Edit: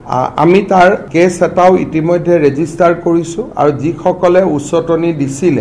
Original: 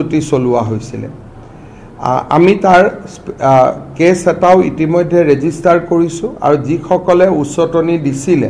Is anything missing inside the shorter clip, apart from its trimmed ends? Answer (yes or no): yes